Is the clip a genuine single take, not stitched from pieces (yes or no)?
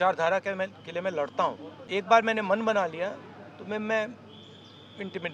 no